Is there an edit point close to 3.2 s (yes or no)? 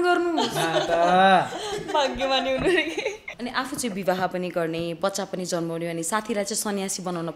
yes